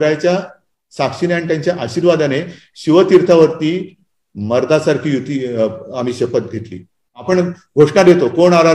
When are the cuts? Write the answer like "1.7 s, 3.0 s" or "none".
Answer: 7.1 s

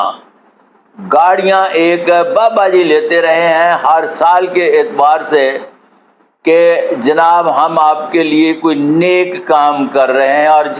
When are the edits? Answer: none

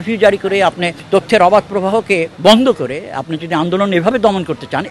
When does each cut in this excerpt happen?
0.9 s

